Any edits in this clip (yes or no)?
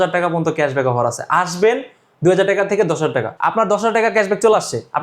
yes